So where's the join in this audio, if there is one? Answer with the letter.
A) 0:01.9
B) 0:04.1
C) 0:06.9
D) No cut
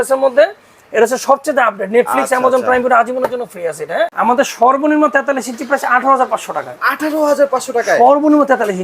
B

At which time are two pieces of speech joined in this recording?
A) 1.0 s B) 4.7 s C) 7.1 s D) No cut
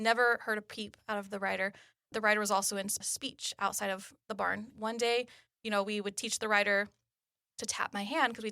B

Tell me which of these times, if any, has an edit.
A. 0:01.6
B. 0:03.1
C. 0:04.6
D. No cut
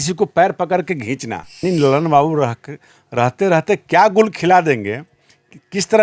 A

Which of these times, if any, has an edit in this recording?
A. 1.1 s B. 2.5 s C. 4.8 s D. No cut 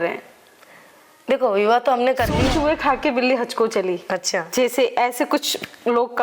B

